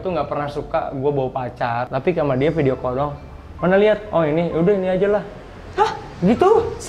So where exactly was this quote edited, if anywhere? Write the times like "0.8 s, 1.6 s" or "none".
1.9 s